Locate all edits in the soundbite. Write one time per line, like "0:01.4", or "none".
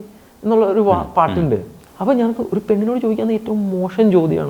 0:01.8